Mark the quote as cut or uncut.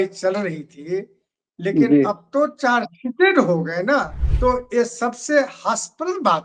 cut